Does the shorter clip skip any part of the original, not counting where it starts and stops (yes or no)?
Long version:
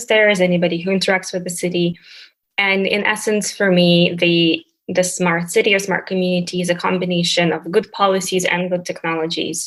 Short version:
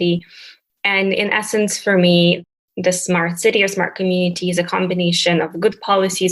yes